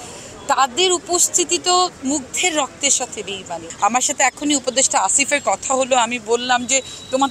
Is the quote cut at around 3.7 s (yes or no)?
yes